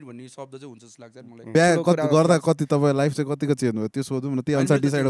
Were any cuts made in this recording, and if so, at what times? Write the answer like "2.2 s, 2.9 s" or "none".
1.5 s